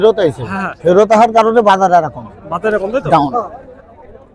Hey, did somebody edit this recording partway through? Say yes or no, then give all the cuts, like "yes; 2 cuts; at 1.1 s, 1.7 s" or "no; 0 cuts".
no; 0 cuts